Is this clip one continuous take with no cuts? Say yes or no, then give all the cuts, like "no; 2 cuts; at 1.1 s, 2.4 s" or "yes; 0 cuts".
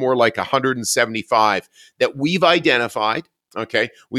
yes; 0 cuts